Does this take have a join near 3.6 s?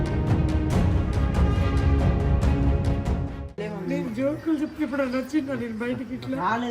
yes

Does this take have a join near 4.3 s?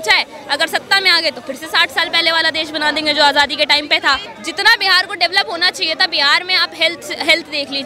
yes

